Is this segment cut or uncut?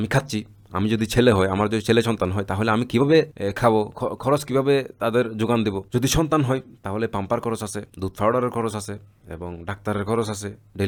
uncut